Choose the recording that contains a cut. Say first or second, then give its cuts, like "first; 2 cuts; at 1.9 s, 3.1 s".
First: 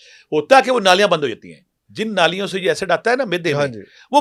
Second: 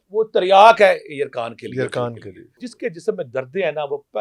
second; 1 cut; at 2.7 s